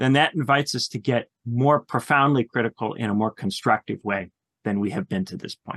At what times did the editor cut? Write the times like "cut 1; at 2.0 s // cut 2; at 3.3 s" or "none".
none